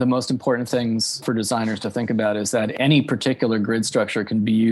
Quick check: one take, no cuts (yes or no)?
no